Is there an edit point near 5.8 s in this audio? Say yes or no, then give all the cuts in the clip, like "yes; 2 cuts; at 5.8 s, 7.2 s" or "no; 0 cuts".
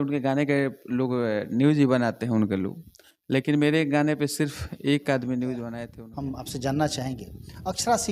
yes; 1 cut; at 5.8 s